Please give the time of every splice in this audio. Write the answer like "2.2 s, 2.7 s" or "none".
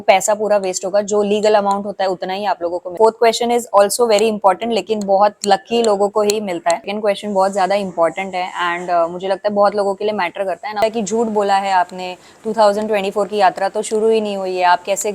2.9 s, 6.9 s, 10.8 s

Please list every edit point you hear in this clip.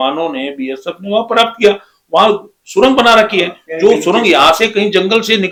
none

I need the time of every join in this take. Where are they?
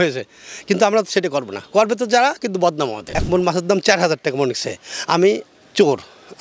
3.0 s

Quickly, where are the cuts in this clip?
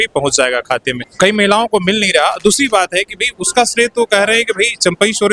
1.0 s

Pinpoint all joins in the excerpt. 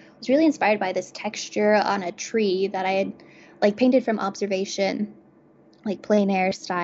none

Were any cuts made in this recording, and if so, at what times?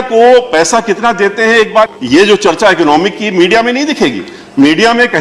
1.9 s

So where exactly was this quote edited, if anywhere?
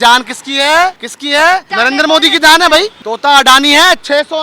1.1 s, 1.7 s, 2.9 s

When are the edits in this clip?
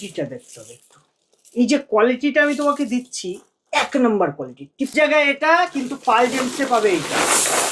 4.9 s

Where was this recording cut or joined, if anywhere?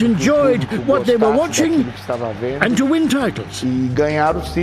3.5 s

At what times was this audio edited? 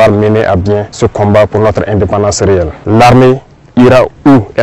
0.9 s, 2.8 s

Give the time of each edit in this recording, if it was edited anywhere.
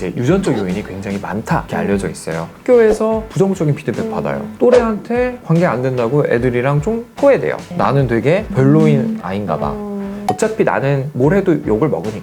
2.5 s, 7.7 s, 10.2 s

